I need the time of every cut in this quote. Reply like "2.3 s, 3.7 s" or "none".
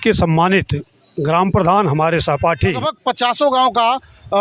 2.9 s